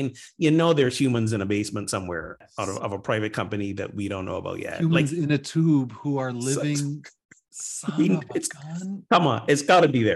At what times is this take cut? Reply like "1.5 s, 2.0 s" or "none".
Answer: none